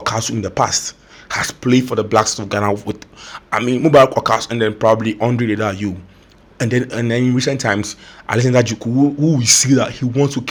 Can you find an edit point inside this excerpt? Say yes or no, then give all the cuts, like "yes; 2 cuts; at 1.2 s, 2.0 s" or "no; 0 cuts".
no; 0 cuts